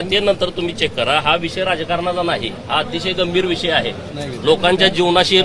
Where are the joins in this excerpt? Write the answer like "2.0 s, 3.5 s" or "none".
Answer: none